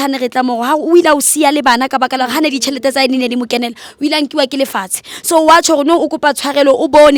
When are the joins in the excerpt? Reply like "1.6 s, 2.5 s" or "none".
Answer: none